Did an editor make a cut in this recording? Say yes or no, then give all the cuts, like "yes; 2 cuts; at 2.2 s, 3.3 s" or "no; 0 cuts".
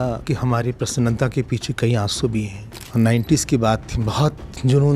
yes; 1 cut; at 2.8 s